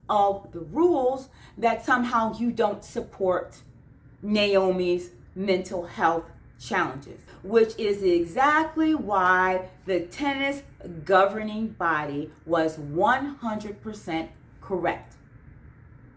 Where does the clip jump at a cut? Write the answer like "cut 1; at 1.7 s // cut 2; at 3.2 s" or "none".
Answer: cut 1; at 7.2 s